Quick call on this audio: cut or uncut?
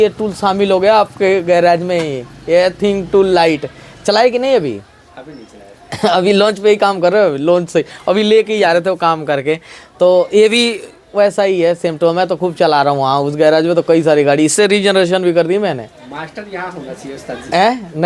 uncut